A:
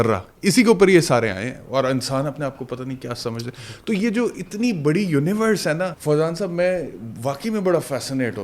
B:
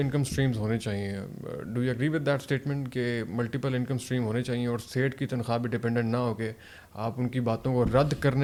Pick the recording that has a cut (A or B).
A